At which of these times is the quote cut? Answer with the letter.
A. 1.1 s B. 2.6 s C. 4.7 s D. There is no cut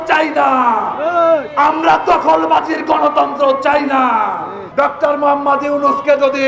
C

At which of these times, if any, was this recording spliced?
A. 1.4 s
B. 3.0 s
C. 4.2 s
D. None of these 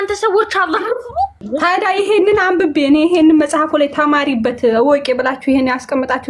A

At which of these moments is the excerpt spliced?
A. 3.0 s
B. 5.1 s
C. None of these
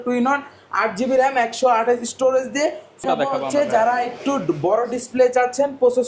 A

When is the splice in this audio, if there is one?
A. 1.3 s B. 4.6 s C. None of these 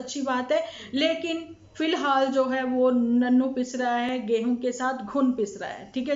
C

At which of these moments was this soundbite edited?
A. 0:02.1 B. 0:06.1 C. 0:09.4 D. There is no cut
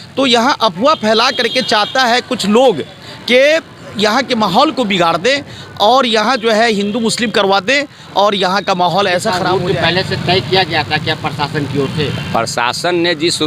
C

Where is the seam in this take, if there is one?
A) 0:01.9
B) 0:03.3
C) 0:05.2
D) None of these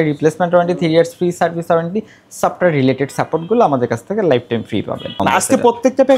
C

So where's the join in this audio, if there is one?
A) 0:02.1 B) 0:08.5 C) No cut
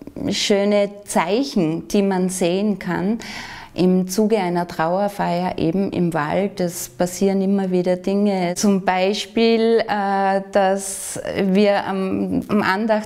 B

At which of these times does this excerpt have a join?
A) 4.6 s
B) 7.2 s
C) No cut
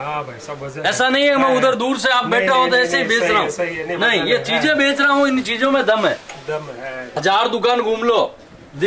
B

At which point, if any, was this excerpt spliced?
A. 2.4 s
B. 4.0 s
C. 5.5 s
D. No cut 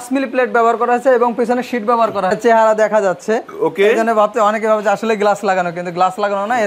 A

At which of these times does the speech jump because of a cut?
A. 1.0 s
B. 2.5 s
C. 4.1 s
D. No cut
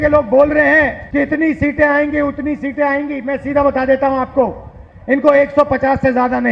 A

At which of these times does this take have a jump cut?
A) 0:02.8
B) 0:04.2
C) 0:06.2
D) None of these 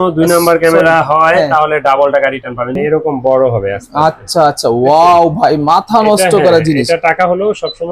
A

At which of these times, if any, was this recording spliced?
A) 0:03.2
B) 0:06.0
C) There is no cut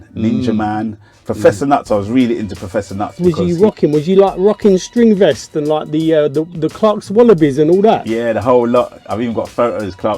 A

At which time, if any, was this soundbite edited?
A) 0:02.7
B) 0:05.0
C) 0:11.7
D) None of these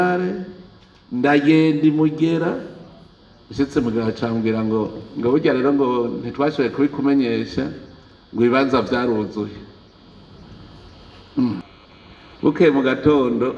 C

